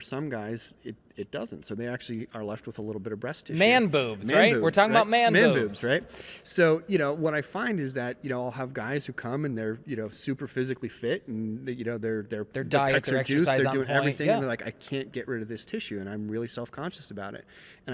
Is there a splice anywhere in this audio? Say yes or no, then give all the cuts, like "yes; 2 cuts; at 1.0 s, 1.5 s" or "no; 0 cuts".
no; 0 cuts